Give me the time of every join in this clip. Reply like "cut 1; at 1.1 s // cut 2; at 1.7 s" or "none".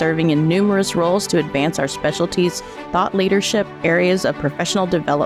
cut 1; at 3.7 s